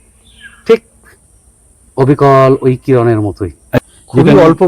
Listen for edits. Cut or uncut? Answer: cut